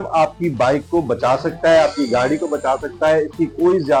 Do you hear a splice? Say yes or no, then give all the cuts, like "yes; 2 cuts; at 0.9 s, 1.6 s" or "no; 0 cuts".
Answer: no; 0 cuts